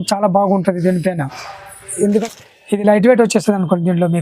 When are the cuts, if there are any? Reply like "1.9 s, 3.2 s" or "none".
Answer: 2.1 s